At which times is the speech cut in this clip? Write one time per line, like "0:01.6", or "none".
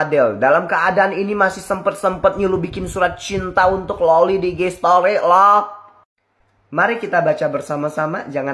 none

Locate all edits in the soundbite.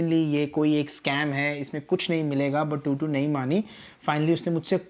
none

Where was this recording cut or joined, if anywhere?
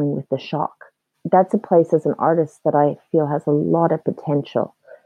0:01.2

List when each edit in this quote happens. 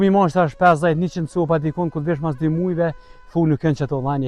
none

